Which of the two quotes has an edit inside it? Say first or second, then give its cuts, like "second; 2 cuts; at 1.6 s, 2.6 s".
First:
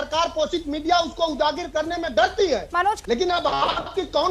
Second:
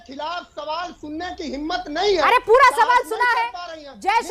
first; 1 cut; at 3.0 s